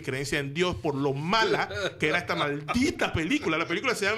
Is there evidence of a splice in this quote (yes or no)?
no